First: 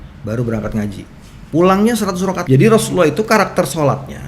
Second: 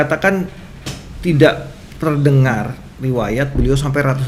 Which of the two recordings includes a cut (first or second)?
first